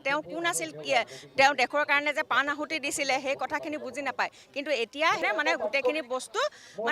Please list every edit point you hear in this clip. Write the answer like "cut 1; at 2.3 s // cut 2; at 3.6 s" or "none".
cut 1; at 5.2 s